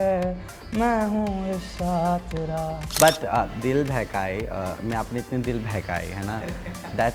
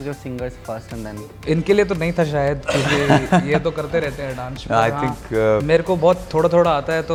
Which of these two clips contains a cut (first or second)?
first